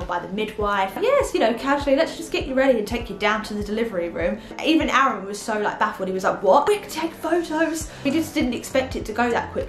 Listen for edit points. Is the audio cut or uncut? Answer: cut